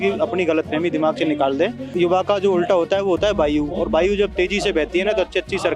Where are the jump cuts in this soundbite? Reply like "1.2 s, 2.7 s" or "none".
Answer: 1.8 s